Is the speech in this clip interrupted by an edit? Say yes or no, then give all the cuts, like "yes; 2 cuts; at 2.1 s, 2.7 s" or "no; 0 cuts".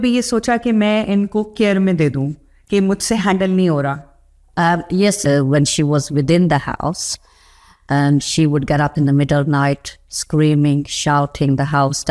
yes; 1 cut; at 5.2 s